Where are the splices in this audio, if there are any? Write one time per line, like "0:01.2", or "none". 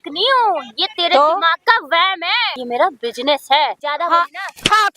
0:02.5
0:03.8